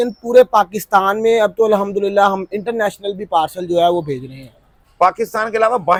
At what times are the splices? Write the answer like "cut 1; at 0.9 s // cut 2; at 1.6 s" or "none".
none

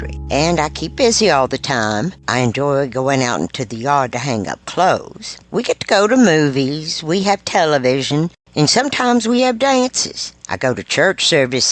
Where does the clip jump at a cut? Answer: none

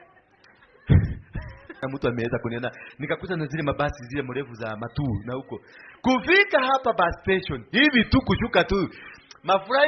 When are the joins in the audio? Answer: cut 1; at 1.7 s

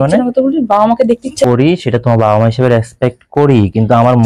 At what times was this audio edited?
cut 1; at 1.4 s

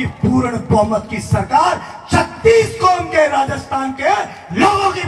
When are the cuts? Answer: none

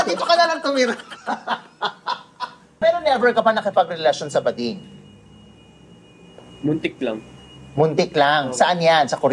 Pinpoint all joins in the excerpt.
cut 1; at 2.8 s

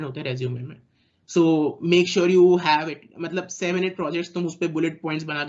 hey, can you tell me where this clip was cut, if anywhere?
none

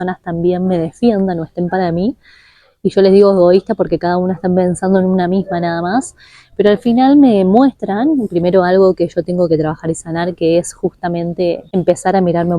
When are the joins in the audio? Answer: cut 1; at 11.6 s

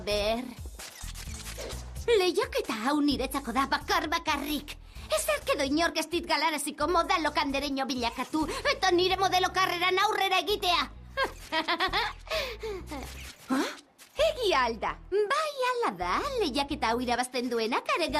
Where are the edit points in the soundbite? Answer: cut 1; at 16.5 s

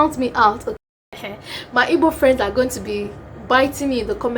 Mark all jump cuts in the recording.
cut 1; at 1.1 s

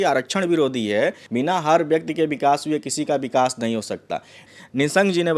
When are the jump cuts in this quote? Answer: cut 1; at 1.2 s // cut 2; at 4.4 s

